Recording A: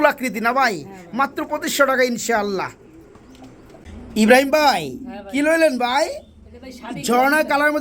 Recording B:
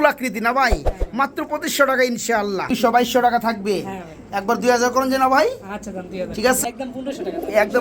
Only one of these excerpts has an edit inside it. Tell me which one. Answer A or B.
B